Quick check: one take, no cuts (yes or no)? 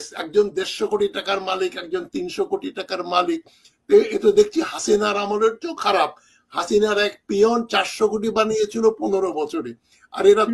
yes